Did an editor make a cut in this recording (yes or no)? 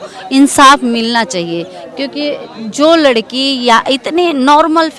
no